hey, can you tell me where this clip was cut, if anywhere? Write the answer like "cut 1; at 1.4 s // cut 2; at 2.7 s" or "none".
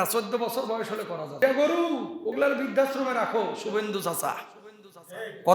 cut 1; at 1.4 s